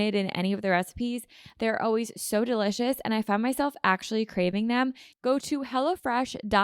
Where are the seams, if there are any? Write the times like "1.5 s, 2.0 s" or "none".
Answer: 5.1 s